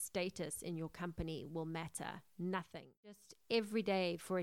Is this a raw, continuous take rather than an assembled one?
no; 1 cut; at 3.3 s

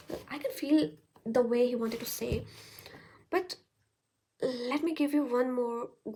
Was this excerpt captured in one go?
yes; 0 cuts

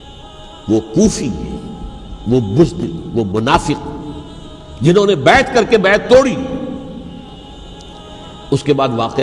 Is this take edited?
yes; 1 cut; at 7.3 s

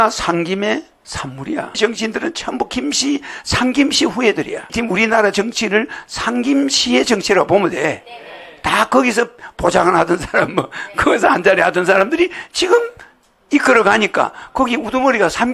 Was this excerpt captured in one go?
no; 1 cut; at 1.8 s

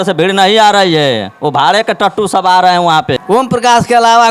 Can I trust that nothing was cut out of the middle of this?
no; 1 cut; at 3.2 s

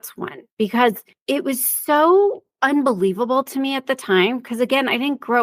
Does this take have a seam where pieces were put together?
yes; 2 cuts; at 1.1 s, 2.5 s

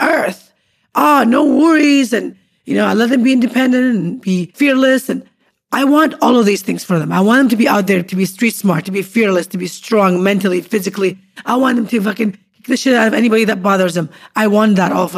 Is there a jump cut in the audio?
yes; 1 cut; at 4.5 s

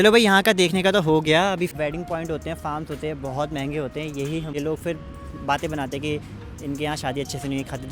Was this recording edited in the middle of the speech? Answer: yes; 2 cuts; at 1.7 s, 4.5 s

